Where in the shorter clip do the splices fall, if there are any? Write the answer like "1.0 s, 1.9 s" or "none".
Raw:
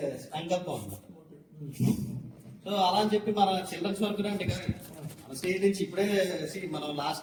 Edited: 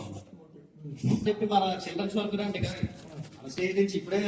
1.2 s